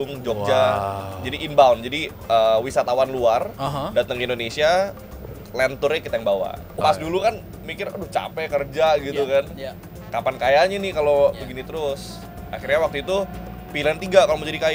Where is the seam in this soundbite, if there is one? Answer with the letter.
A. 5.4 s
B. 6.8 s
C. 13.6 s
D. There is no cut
B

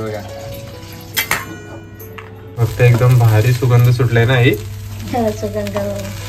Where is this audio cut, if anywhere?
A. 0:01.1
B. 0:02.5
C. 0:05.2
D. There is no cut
B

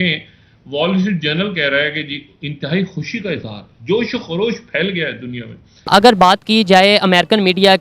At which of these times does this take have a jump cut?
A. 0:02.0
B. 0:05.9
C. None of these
B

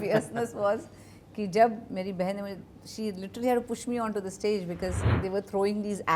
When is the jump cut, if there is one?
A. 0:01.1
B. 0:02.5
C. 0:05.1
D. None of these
C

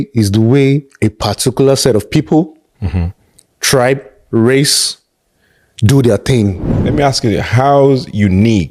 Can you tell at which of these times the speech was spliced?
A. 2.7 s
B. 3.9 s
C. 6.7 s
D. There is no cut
C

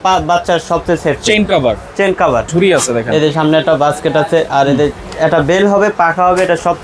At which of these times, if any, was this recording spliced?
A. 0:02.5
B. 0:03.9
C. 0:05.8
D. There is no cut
A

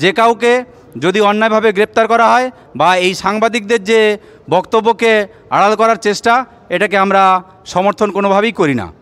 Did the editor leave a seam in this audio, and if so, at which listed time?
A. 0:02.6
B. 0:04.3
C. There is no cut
C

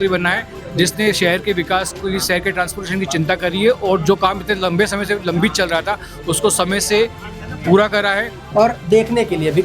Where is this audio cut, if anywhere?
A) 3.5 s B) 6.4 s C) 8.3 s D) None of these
C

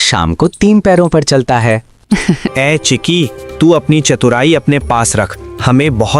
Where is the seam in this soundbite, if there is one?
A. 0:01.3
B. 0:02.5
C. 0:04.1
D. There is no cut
B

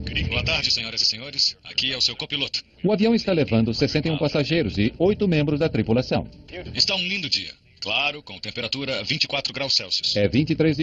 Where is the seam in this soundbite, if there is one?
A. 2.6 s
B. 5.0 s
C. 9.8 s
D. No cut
D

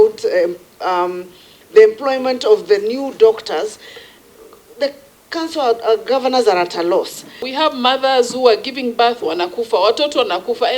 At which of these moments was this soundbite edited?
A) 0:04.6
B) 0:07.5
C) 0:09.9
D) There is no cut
B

